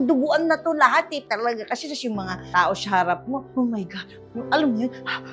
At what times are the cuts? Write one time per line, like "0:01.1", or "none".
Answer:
0:01.2